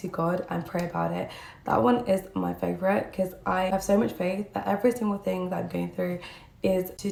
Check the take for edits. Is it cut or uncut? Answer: uncut